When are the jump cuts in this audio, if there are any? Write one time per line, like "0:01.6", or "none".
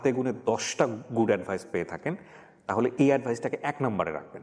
none